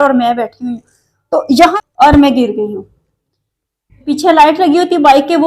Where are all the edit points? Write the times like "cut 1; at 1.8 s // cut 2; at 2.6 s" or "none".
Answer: cut 1; at 1.7 s // cut 2; at 4.0 s